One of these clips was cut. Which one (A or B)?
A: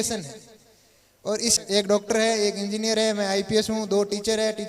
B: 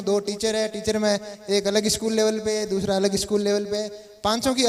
A